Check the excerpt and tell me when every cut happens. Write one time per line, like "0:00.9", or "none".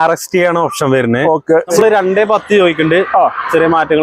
0:01.7